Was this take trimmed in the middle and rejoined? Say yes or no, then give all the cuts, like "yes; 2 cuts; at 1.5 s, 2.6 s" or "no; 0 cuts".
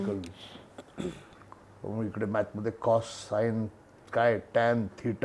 no; 0 cuts